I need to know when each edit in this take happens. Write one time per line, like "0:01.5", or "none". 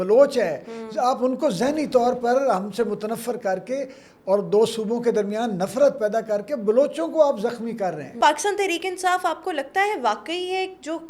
0:08.2